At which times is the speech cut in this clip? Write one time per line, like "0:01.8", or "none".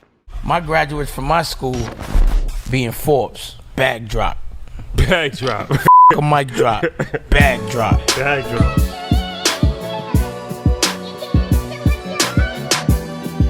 none